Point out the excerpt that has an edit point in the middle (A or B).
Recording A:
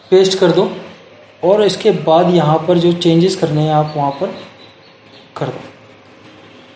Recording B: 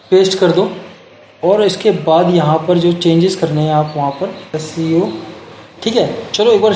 B